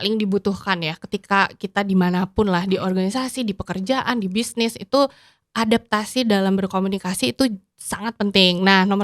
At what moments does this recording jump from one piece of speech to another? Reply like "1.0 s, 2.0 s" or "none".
none